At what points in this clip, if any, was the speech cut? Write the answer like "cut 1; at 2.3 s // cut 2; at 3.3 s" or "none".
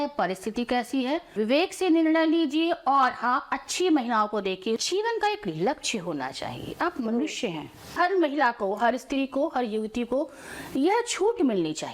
cut 1; at 1.3 s // cut 2; at 4.8 s // cut 3; at 7.9 s